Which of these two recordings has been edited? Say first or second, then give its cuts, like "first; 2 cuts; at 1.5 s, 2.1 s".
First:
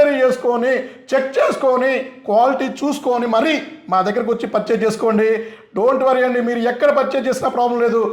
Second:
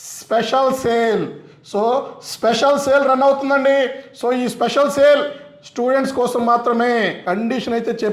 second; 1 cut; at 7.2 s